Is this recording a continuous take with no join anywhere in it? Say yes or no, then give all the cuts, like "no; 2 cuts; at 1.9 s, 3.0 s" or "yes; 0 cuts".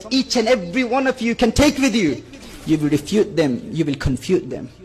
no; 1 cut; at 2.4 s